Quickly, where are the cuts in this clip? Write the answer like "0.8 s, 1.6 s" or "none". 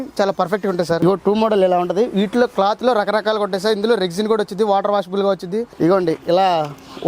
1.0 s, 5.7 s